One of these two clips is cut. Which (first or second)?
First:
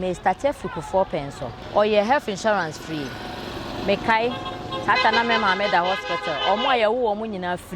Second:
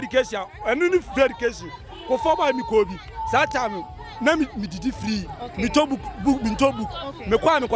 first